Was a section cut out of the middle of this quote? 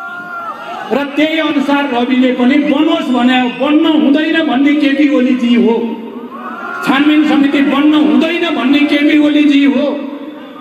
no; 0 cuts

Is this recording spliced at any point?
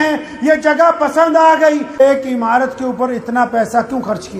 yes; 1 cut; at 2.0 s

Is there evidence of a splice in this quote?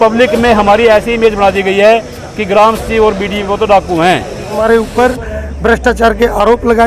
yes; 1 cut; at 4.6 s

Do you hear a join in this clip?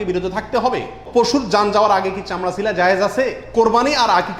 yes; 2 cuts; at 1.0 s, 3.4 s

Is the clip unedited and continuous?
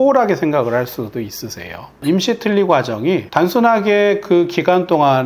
no; 2 cuts; at 2.0 s, 3.3 s

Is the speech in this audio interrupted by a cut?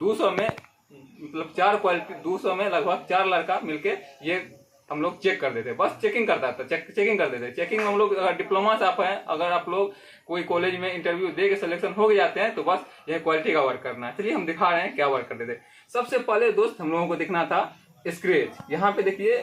no; 0 cuts

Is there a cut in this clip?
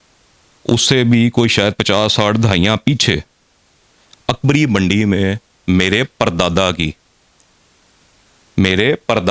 no; 0 cuts

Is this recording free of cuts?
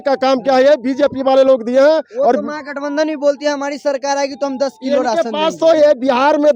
yes; 0 cuts

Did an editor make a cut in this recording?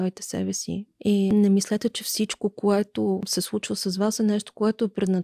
yes; 2 cuts; at 1.3 s, 3.3 s

